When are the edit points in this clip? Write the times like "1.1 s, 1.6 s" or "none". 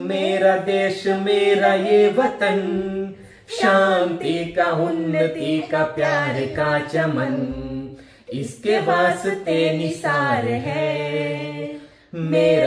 none

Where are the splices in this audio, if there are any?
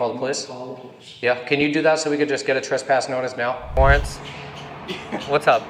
3.8 s

